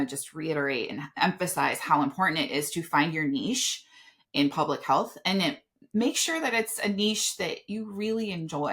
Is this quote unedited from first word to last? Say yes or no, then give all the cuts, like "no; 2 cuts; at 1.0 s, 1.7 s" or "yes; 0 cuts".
yes; 0 cuts